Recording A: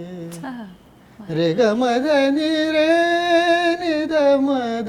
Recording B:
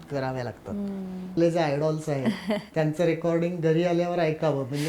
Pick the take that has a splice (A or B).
B